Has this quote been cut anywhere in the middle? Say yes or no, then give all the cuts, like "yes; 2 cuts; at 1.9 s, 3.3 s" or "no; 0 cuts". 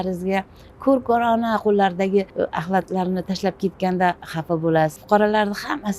yes; 2 cuts; at 2.4 s, 5.0 s